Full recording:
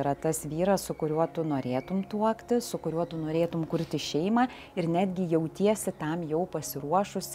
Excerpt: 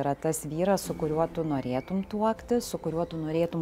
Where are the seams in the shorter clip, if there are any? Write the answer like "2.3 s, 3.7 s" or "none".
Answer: none